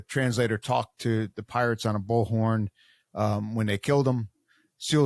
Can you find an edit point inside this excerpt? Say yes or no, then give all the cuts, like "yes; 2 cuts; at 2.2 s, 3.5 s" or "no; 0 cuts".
no; 0 cuts